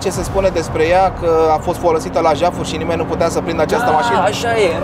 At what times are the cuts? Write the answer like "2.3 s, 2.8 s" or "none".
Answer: none